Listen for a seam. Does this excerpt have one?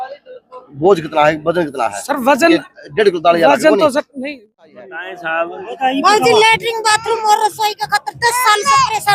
yes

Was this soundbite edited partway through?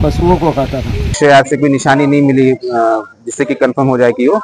yes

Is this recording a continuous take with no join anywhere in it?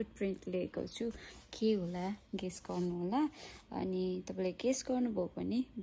yes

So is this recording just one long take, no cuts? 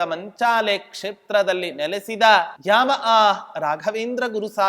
no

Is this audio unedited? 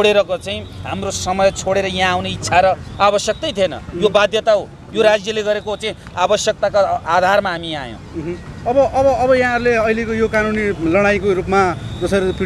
yes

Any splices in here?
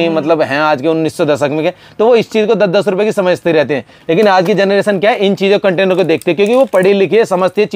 no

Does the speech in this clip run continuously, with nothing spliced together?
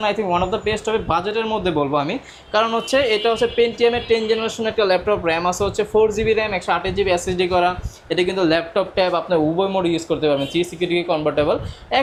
yes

